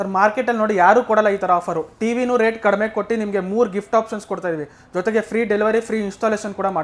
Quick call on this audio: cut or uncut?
uncut